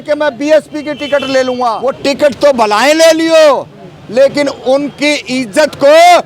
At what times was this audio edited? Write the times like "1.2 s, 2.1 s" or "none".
1.8 s